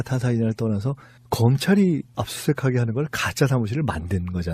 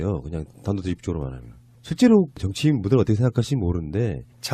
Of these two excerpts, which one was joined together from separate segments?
second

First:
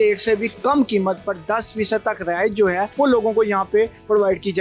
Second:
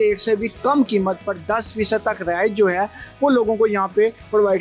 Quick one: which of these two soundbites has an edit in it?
first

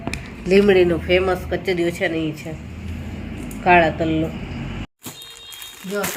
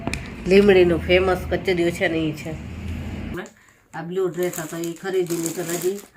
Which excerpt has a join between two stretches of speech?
second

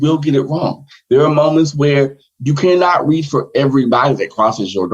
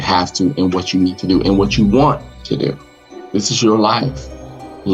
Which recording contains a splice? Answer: second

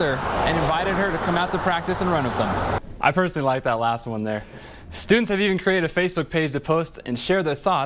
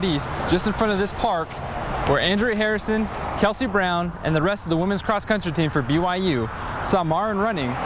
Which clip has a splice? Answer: first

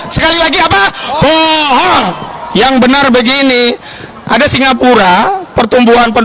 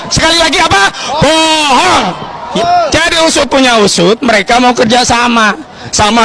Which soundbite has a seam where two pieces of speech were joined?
second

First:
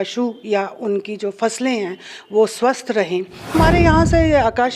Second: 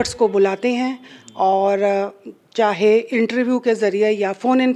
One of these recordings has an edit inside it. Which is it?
first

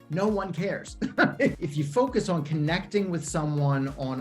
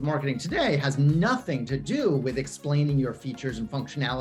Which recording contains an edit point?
first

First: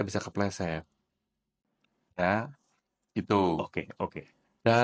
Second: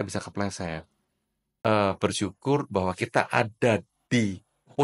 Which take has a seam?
second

